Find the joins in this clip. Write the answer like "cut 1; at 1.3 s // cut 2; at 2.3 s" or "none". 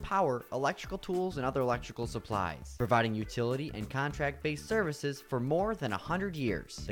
none